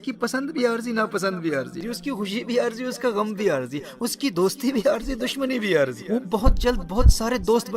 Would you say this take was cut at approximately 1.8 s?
yes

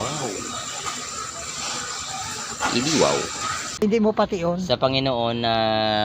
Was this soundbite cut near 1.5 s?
no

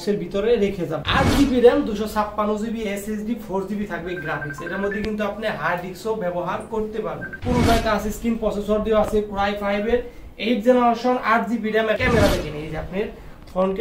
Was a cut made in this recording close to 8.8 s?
no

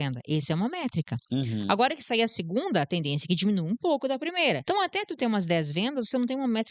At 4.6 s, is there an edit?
yes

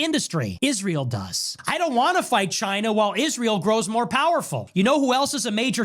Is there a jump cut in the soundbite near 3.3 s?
no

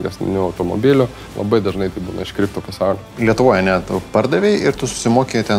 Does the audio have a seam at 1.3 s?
yes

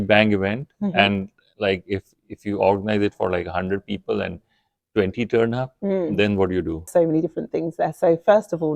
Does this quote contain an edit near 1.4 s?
no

